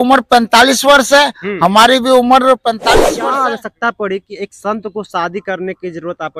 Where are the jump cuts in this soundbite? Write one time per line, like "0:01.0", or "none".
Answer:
0:02.9

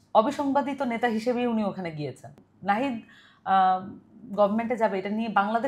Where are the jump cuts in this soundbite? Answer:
0:02.4

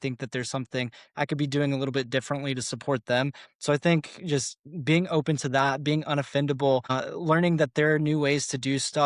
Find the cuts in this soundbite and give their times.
none

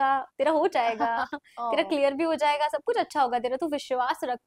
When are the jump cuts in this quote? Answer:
none

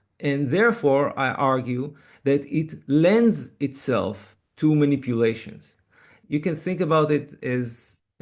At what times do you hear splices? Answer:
0:06.1
0:07.5

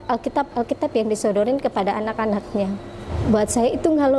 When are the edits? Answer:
0:03.1

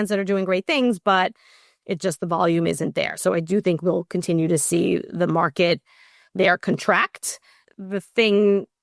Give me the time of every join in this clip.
0:07.6

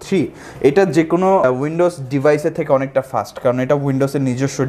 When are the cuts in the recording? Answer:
0:01.4

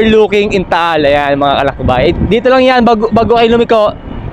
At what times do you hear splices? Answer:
none

